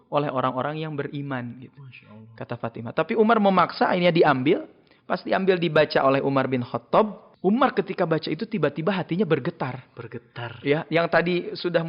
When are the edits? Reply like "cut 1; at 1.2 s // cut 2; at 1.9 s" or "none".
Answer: cut 1; at 7.2 s